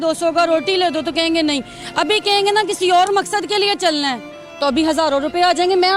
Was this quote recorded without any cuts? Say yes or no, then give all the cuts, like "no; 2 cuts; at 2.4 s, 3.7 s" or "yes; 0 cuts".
yes; 0 cuts